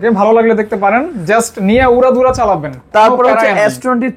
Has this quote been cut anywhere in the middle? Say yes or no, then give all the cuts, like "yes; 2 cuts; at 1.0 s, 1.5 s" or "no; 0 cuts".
no; 0 cuts